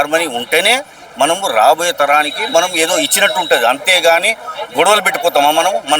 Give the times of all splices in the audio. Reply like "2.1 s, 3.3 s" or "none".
none